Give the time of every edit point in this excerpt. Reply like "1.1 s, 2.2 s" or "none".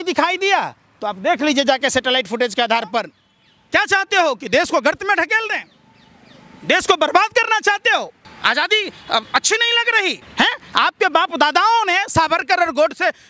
3.2 s, 8.2 s, 10.2 s